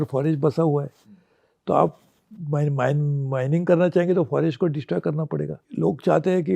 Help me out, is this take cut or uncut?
cut